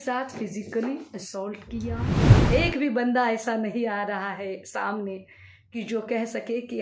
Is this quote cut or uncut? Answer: cut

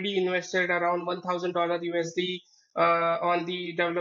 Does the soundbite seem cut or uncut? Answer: uncut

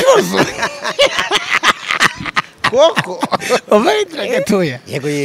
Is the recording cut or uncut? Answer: uncut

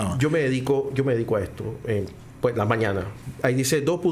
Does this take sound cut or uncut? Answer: cut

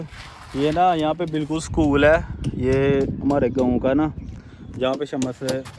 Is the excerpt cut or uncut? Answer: uncut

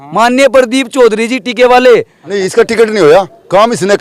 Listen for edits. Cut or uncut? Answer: cut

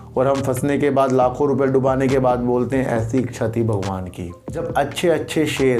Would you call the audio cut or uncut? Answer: cut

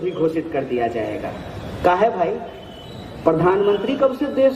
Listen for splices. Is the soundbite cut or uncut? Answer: uncut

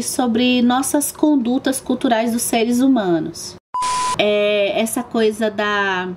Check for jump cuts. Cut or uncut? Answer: cut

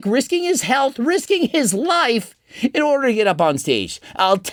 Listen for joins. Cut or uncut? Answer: uncut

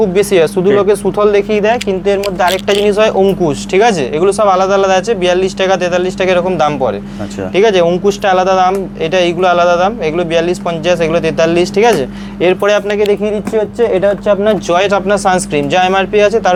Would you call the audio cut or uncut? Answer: uncut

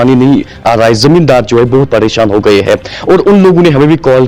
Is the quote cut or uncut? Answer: uncut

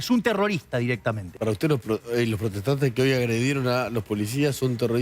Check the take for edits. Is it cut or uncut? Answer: cut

